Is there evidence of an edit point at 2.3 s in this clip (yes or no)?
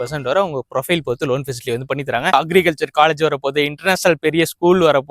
yes